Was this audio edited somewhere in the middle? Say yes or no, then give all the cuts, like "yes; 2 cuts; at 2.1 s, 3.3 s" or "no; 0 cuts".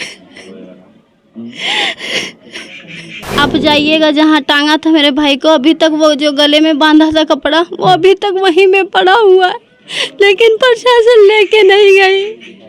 yes; 1 cut; at 3.3 s